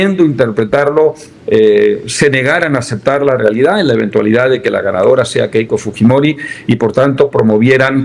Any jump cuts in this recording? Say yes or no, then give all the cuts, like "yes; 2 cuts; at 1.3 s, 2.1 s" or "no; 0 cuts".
no; 0 cuts